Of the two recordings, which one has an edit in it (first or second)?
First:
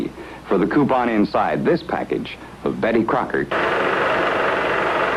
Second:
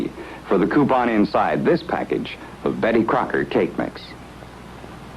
second